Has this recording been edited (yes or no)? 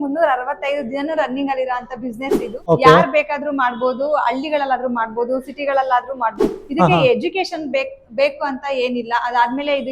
yes